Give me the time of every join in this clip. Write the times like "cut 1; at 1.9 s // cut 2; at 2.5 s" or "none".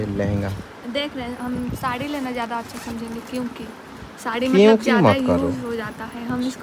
none